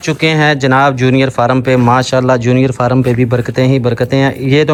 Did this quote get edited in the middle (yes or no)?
no